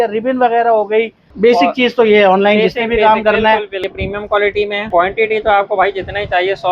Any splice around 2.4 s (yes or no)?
no